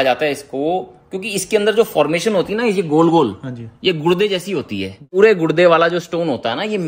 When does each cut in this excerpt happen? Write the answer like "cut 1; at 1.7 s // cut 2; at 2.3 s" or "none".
cut 1; at 5.1 s